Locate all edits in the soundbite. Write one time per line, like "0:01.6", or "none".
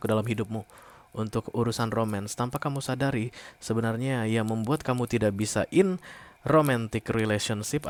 none